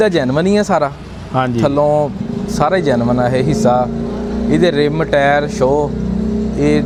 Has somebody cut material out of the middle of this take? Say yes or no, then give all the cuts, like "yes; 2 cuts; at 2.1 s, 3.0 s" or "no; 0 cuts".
no; 0 cuts